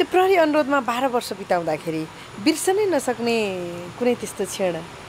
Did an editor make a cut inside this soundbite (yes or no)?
no